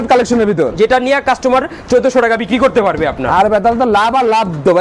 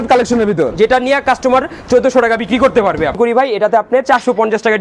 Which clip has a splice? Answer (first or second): second